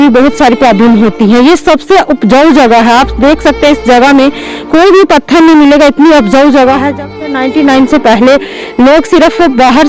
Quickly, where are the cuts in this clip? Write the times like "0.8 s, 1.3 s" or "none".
none

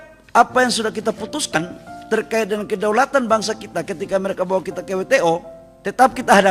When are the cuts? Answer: none

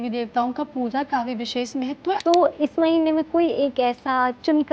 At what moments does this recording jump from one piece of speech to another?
2.2 s

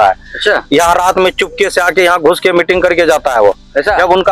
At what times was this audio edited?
none

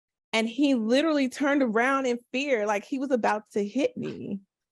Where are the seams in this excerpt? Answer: none

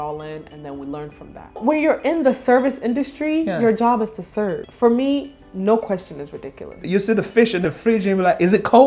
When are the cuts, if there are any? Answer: 1.6 s, 4.6 s, 6.8 s

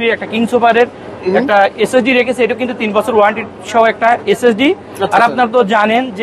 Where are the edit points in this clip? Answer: none

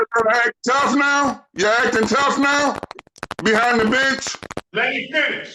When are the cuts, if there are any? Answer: 4.6 s

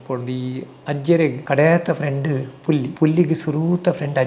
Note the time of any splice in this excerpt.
1.4 s, 2.9 s

